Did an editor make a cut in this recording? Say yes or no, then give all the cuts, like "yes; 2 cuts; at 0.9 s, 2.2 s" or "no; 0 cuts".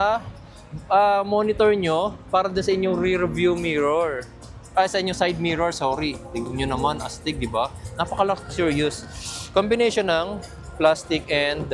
yes; 1 cut; at 7.8 s